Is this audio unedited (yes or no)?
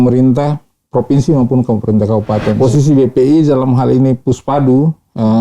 no